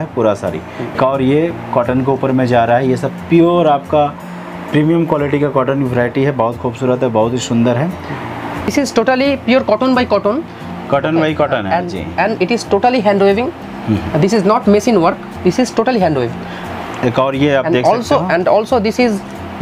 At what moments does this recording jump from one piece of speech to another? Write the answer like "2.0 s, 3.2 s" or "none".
1.0 s, 8.7 s, 16.7 s